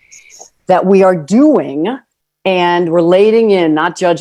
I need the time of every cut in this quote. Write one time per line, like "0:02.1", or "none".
none